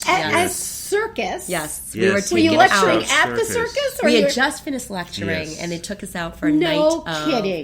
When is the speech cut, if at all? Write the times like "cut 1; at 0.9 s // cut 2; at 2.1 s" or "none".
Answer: none